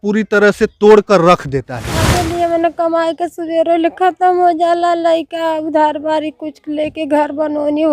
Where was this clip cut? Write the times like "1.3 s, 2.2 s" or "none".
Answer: 2.1 s